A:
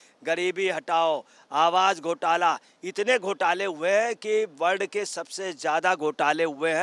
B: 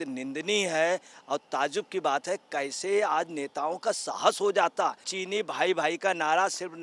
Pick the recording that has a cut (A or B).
B